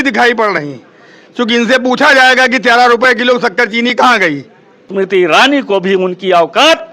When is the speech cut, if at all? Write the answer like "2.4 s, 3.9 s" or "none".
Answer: 4.9 s